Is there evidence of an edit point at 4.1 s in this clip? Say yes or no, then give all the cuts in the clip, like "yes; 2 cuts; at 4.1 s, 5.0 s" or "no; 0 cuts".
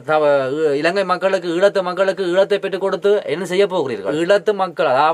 yes; 1 cut; at 4.1 s